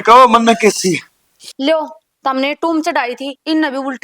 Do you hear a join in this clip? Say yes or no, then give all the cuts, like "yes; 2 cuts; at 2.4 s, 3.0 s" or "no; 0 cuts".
yes; 1 cut; at 1.4 s